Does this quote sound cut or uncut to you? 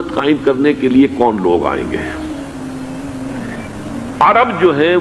uncut